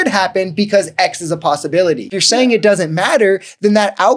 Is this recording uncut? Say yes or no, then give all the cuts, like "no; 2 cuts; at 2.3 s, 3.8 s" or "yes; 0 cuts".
no; 1 cut; at 2.2 s